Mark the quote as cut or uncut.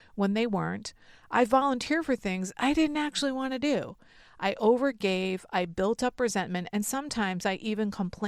uncut